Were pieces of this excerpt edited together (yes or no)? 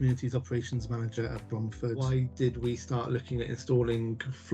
yes